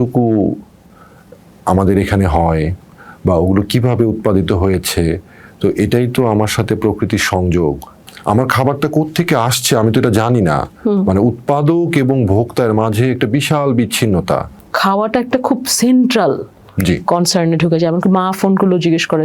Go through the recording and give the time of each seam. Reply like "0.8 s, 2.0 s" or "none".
8.0 s, 14.6 s